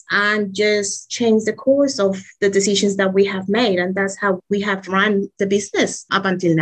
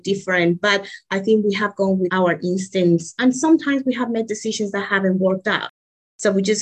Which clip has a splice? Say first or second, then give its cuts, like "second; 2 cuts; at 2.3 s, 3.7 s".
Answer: second; 1 cut; at 3.2 s